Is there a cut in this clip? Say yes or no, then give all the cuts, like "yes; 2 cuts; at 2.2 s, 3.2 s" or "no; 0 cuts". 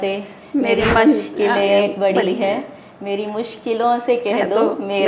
no; 0 cuts